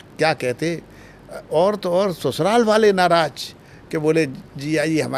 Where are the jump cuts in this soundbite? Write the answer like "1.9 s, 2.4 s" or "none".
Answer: none